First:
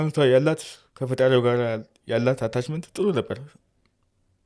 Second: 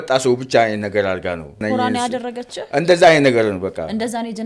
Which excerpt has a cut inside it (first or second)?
second